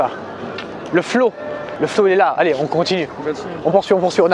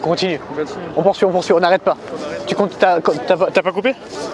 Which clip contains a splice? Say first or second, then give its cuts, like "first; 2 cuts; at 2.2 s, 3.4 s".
first; 1 cut; at 1.7 s